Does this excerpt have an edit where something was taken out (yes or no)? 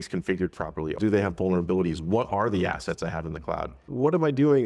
yes